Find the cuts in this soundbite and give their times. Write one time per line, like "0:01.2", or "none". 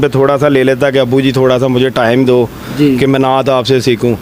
none